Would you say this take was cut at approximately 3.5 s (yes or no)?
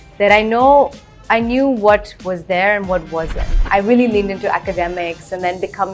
yes